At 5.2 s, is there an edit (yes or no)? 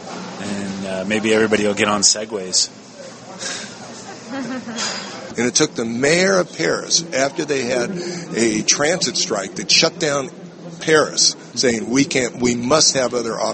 yes